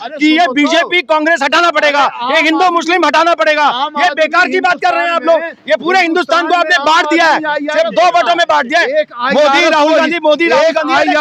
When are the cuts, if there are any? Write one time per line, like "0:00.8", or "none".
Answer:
none